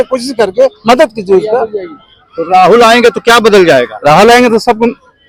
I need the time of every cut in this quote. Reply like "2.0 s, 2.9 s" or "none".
none